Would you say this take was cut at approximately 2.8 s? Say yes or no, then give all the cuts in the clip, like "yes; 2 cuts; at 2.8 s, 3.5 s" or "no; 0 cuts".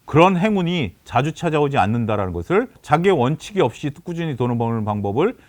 yes; 1 cut; at 2.8 s